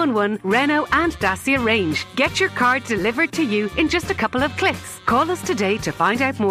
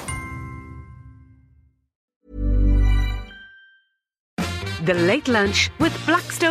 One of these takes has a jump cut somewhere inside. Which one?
second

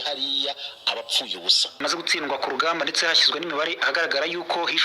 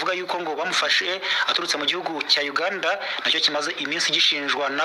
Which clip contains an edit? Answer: first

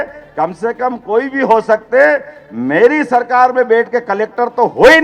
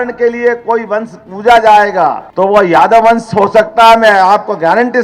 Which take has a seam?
second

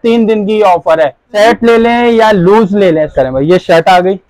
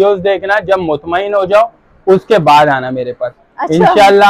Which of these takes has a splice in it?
first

